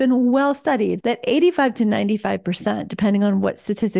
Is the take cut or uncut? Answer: cut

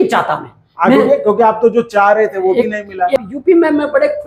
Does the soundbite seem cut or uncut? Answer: cut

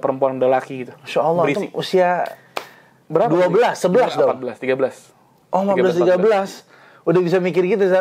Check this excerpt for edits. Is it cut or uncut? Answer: uncut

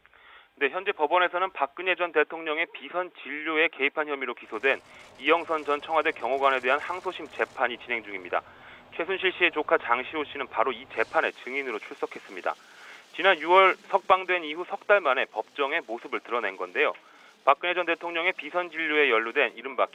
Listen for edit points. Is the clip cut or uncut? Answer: uncut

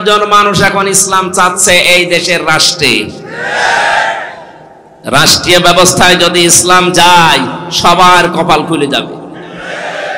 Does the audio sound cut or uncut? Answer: uncut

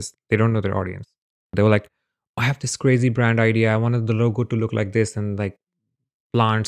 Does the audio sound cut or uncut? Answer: cut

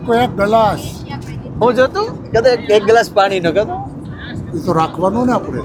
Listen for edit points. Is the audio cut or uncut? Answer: uncut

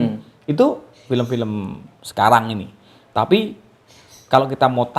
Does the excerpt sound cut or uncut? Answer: uncut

